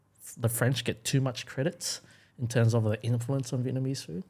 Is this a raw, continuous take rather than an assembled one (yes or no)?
yes